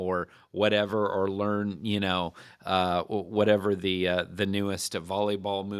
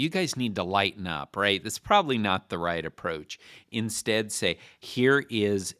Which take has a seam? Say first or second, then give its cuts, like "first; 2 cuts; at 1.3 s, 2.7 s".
second; 1 cut; at 4.7 s